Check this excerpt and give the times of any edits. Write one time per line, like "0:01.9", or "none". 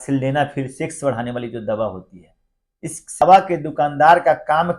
0:03.2